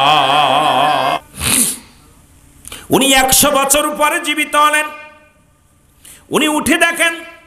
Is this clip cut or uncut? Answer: cut